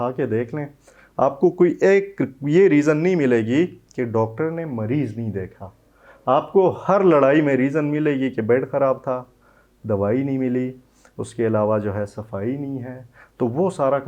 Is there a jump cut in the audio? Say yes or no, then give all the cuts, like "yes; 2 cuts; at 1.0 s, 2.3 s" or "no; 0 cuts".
no; 0 cuts